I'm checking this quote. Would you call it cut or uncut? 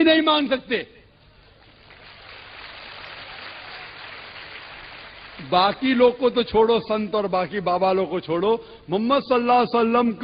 uncut